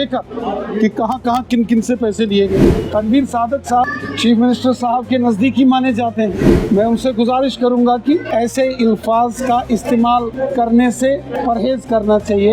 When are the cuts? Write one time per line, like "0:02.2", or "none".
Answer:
0:02.6
0:03.9
0:06.5
0:08.3
0:10.3
0:11.3